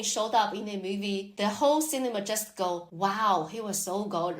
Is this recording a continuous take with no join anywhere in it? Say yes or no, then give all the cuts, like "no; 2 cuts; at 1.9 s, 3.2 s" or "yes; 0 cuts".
no; 2 cuts; at 1.3 s, 2.9 s